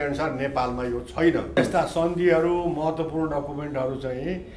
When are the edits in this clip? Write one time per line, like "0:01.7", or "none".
0:01.6